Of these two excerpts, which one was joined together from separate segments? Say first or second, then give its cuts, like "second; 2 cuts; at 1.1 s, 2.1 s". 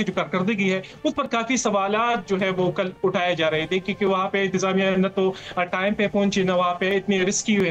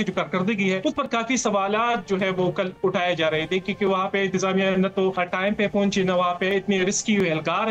second; 2 cuts; at 0.8 s, 5.2 s